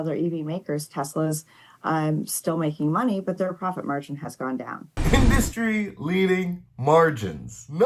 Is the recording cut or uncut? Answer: uncut